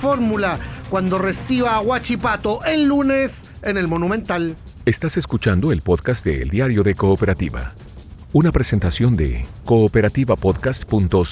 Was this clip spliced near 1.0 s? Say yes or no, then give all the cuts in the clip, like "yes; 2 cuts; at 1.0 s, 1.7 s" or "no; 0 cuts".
no; 1 cut; at 4.7 s